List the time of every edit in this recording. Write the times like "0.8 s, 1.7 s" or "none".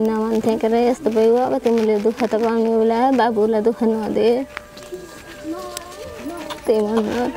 none